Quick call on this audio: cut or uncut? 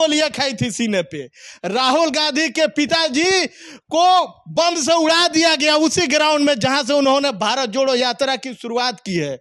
uncut